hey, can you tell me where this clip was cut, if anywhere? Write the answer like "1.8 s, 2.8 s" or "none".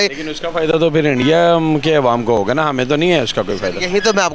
none